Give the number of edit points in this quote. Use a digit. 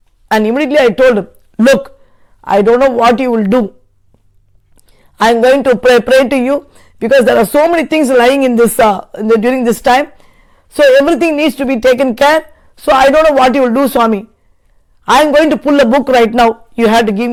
0